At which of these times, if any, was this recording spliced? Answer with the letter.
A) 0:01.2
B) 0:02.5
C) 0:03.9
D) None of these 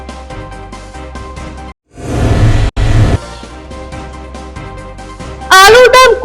A